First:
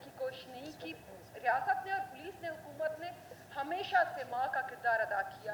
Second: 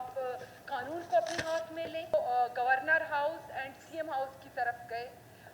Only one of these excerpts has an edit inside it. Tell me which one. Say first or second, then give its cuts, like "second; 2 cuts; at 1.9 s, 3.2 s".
second; 1 cut; at 2.1 s